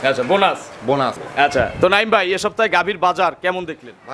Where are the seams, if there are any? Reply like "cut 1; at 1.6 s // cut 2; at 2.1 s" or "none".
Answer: cut 1; at 1.2 s